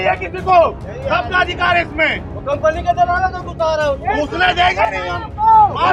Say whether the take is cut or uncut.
uncut